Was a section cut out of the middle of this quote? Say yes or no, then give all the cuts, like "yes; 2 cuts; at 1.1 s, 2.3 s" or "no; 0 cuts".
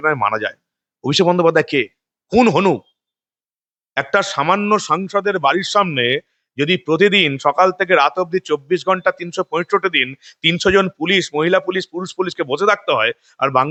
no; 0 cuts